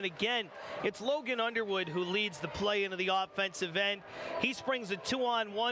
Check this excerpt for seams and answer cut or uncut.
uncut